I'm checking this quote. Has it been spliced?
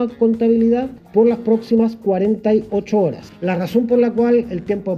yes; 2 cuts; at 1.0 s, 3.3 s

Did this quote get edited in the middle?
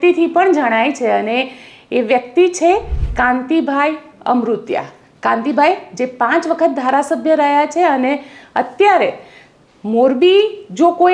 no; 0 cuts

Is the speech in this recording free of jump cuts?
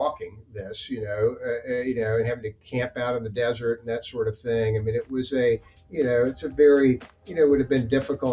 yes; 0 cuts

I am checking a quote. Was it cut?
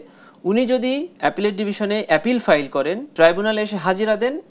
yes; 2 cuts; at 1.1 s, 3.0 s

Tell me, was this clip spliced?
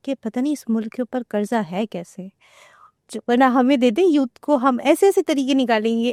no; 0 cuts

